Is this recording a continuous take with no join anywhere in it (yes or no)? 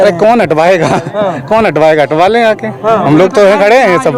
yes